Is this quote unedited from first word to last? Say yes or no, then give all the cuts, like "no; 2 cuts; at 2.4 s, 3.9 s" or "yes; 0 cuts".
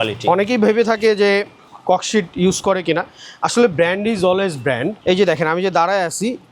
no; 1 cut; at 5.0 s